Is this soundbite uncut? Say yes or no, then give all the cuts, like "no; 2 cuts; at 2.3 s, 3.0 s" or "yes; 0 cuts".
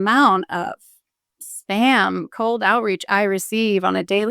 yes; 0 cuts